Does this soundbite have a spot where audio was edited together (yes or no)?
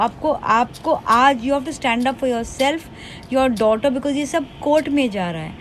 no